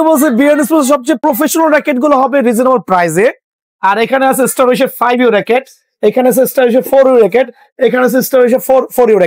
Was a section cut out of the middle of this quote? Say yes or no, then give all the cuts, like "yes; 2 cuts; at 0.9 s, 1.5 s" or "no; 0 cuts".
yes; 1 cut; at 1.2 s